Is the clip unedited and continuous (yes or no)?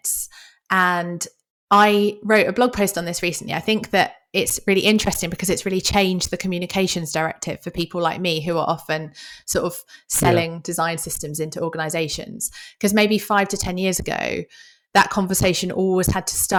yes